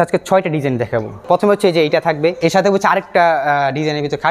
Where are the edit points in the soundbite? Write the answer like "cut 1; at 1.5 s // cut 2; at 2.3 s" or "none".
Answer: cut 1; at 1.2 s // cut 2; at 2.4 s